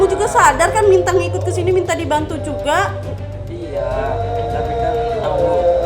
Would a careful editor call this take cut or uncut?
uncut